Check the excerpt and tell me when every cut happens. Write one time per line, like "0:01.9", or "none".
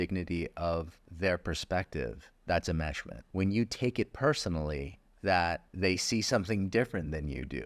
0:01.0
0:02.3
0:03.1
0:05.0
0:05.7